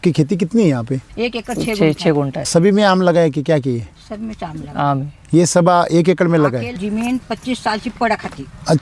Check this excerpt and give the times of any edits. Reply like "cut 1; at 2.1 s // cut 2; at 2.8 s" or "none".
cut 1; at 1.1 s // cut 2; at 2.4 s // cut 3; at 6.8 s